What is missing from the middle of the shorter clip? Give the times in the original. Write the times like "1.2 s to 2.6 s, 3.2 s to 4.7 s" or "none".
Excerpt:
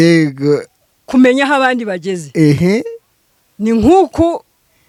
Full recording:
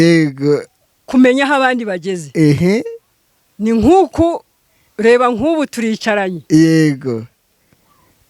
none

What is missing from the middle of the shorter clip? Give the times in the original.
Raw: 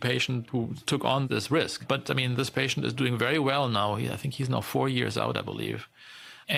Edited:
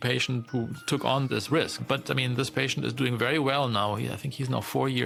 none

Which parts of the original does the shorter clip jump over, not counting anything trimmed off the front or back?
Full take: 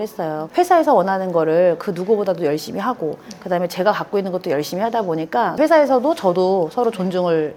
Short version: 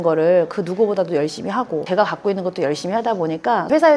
3.1 s to 3.7 s

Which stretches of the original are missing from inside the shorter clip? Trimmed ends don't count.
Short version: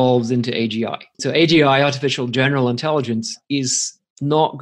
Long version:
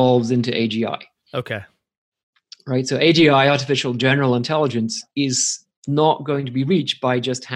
1.2 s to 2.9 s

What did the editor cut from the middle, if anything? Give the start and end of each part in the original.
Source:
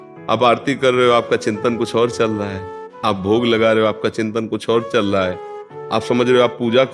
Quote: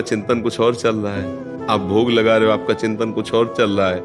none

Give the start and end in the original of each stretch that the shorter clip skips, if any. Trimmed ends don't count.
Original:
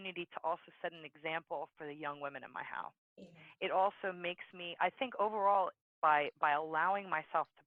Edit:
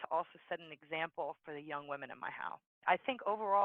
3.0 s to 4.6 s

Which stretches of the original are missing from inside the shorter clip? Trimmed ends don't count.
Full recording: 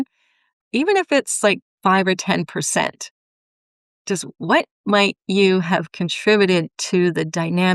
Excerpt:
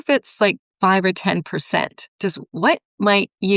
3.1 s to 3.9 s

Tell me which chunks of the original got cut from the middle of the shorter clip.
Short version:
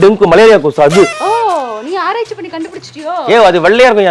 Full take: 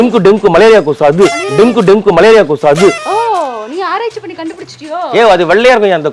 1.3 s to 2.9 s

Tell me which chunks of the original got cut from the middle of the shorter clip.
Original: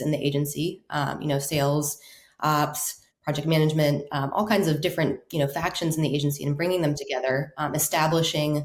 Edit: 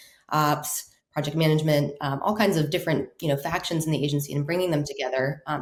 none

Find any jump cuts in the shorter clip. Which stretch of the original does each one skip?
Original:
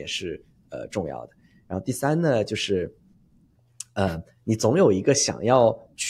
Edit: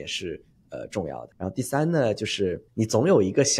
1.3 s to 1.6 s, 2.9 s to 4.3 s

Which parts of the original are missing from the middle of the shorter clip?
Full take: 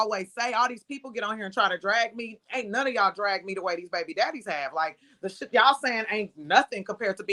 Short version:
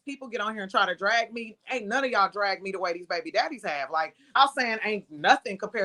5.2 s to 5.6 s

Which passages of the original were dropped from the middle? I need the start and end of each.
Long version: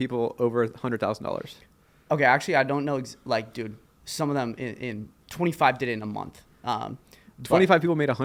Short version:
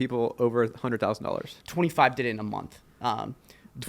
1.6 s to 5.2 s

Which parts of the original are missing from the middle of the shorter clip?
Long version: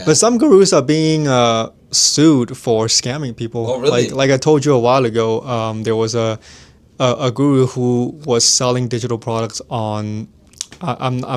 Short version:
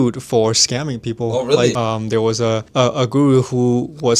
4.1 s to 5.5 s, 6.4 s to 6.9 s

